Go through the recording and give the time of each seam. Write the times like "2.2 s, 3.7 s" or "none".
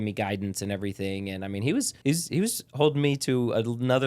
1.9 s